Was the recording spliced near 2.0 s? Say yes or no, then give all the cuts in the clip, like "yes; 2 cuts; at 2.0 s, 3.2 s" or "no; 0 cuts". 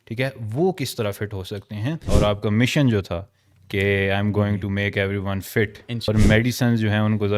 yes; 2 cuts; at 2.0 s, 6.1 s